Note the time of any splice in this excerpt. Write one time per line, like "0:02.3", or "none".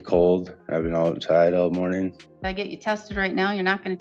none

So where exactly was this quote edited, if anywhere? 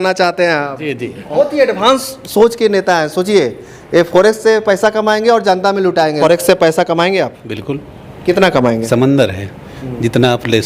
0:01.3
0:06.2
0:08.9

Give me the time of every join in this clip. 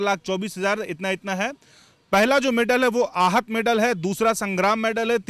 none

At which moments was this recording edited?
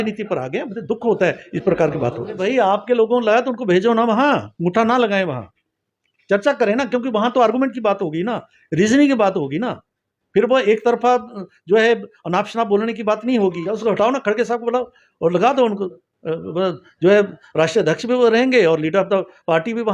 0:02.4
0:13.8

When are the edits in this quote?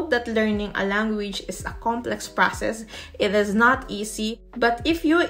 none

